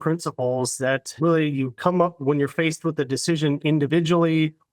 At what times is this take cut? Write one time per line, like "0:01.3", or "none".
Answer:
0:01.1

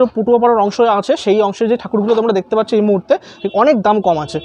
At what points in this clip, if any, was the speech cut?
0:03.3

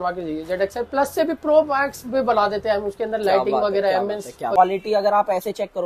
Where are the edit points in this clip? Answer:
0:04.6

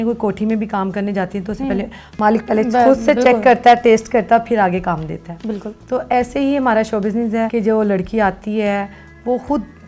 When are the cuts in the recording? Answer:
none

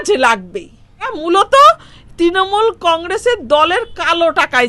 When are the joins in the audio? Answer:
0:01.1

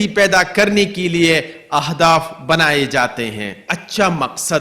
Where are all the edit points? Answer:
0:03.7

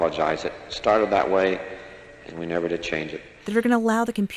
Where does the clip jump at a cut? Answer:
0:03.4

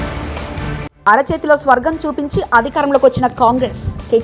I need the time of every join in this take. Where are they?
0:00.9

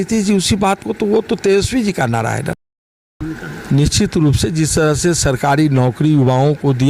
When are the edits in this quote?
0:03.0

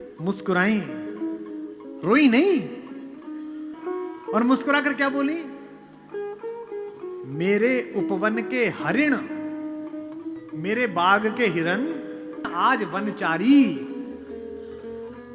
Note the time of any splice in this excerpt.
0:03.8
0:12.5

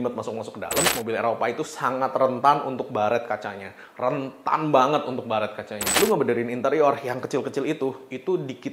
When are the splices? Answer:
0:00.9
0:05.8

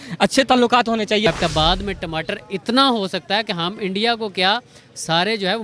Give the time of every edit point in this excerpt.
0:01.3

